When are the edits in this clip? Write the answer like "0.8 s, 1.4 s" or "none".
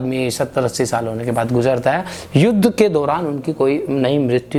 none